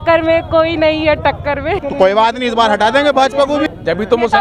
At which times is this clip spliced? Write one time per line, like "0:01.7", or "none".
0:01.8
0:03.6

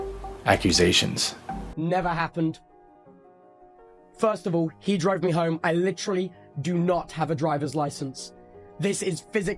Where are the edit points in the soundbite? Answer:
0:01.7

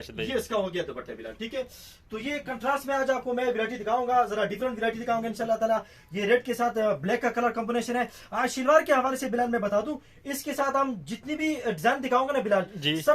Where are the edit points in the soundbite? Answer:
none

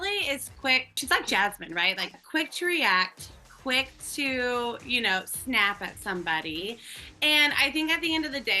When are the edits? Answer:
0:01.0

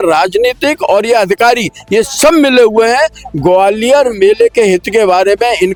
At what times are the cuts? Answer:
none

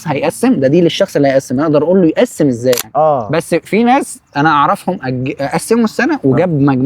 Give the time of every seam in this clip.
0:02.9

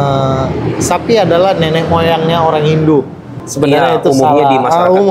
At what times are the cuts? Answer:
none

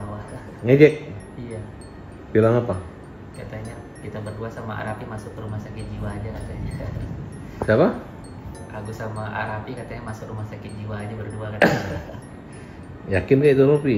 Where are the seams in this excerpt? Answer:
none

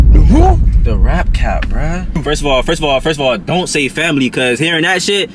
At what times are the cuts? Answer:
0:02.2

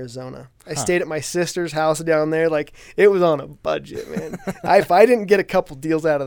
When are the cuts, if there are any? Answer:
none

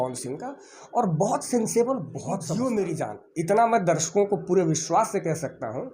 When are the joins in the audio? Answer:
0:02.5

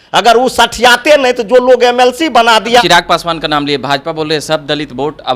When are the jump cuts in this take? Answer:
0:02.8

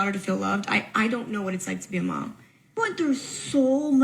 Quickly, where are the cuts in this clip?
0:02.8

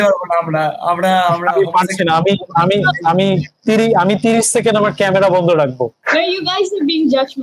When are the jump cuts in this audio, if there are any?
0:06.0

